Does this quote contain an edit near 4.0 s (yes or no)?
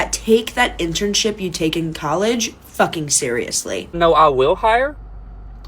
yes